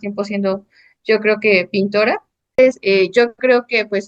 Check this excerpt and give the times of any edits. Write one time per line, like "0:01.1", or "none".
0:02.6